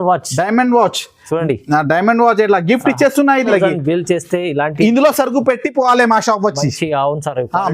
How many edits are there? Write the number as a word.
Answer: one